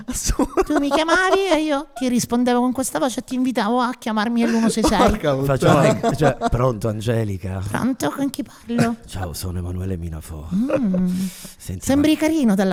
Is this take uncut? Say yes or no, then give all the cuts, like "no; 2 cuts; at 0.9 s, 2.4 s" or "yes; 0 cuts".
yes; 0 cuts